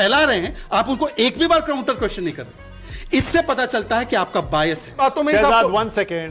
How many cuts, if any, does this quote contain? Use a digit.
1